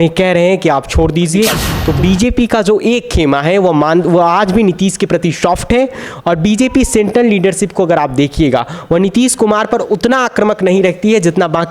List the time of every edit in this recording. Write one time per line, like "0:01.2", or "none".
0:01.7